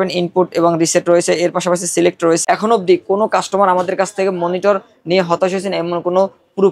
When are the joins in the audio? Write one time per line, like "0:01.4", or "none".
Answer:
0:02.4